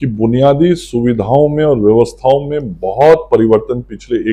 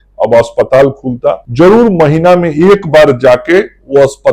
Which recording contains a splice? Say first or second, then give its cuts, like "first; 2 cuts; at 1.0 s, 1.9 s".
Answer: second; 1 cut; at 1.4 s